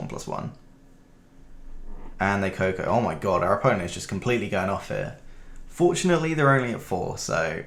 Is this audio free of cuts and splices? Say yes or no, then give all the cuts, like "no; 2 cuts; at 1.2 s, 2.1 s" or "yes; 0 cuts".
yes; 0 cuts